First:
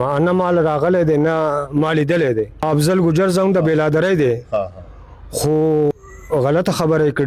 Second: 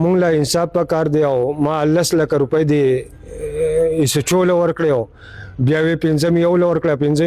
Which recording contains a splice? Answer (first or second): first